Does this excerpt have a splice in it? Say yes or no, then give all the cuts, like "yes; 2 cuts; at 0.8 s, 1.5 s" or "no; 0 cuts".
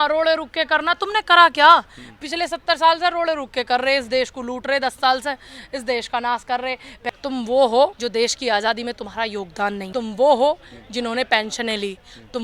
yes; 3 cuts; at 6.9 s, 8.0 s, 9.8 s